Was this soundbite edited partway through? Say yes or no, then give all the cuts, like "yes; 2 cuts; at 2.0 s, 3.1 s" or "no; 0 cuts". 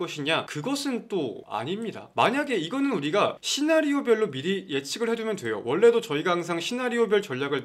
no; 0 cuts